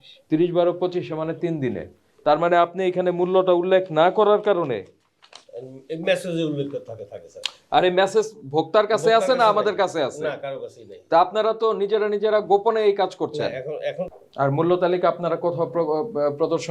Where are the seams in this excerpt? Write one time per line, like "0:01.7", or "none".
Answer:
0:14.0